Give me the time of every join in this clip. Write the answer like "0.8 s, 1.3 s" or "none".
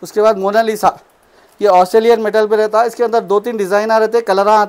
none